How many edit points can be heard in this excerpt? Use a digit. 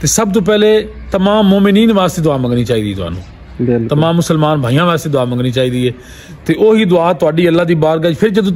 0